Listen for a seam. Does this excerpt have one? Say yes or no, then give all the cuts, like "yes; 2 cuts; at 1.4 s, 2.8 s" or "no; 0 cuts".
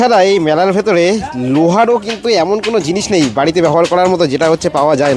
no; 0 cuts